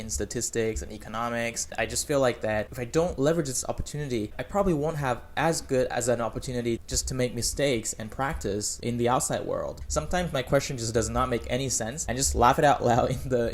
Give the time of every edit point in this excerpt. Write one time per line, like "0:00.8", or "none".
0:01.7
0:08.7
0:09.8
0:12.0